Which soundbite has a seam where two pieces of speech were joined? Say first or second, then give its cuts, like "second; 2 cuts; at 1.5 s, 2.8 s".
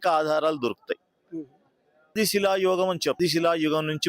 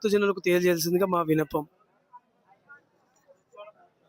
first; 2 cuts; at 2.1 s, 3.2 s